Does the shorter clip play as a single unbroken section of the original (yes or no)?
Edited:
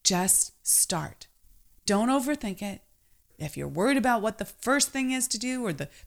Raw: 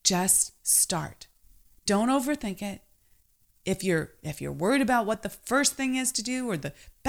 no